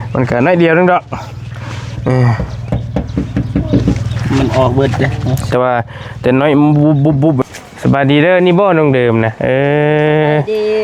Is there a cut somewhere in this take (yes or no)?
yes